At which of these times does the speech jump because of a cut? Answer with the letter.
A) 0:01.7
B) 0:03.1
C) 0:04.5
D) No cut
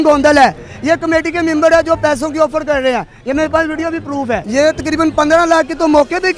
C